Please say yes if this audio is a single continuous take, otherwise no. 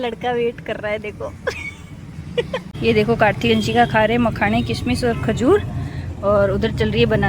no